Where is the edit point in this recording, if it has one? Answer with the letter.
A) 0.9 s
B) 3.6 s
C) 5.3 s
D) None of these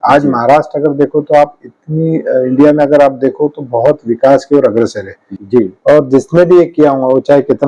C